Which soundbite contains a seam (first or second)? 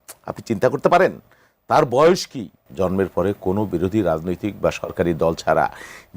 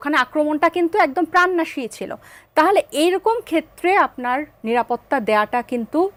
first